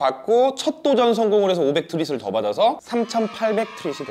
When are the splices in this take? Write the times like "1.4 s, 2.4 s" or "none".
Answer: 2.8 s

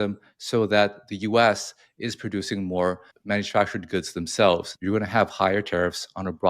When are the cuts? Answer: 3.1 s, 4.7 s

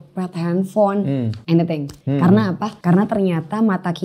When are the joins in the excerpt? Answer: 1.4 s, 1.9 s, 2.7 s

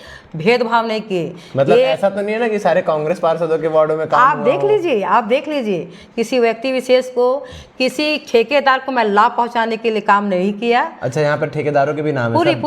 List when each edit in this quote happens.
none

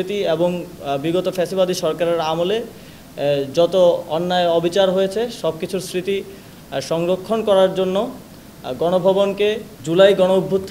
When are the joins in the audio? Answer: 9.7 s

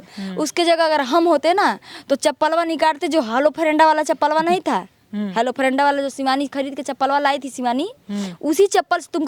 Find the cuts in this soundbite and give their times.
none

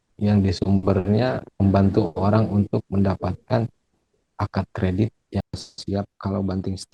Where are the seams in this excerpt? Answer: 5.6 s

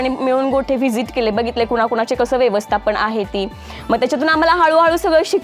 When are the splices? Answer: none

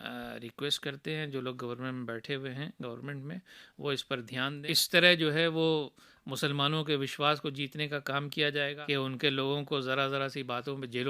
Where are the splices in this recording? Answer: 4.5 s, 8.8 s

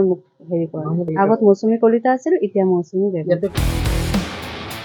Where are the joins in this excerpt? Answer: 1.1 s, 3.5 s

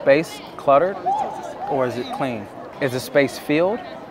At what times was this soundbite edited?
2.6 s

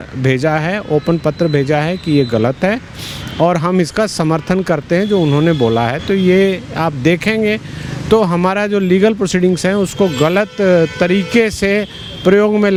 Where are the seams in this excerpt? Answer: none

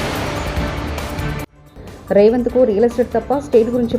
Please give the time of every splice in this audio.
1.4 s

